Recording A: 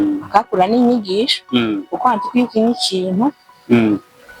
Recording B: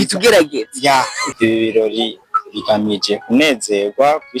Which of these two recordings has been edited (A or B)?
B